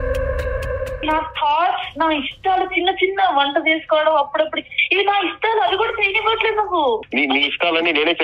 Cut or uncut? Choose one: cut